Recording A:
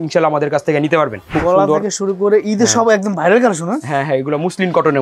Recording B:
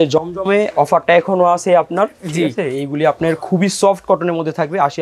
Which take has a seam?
A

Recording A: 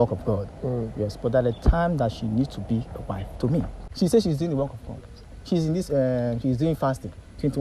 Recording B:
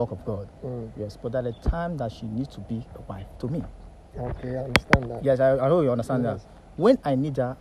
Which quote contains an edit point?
A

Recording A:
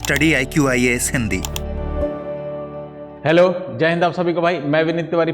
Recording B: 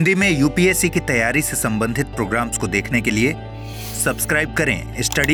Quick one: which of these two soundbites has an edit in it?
A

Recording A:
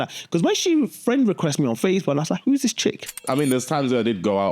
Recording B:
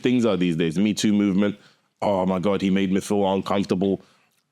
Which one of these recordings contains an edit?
A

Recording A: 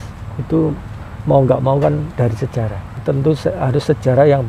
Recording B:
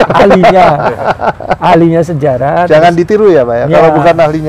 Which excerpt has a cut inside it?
A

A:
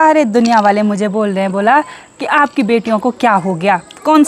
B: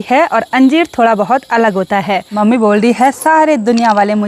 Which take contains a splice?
B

